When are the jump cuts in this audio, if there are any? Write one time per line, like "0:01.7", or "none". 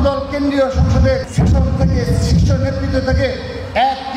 0:01.3